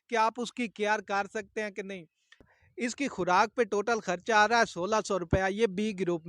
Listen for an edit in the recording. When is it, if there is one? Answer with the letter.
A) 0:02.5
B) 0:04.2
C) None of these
A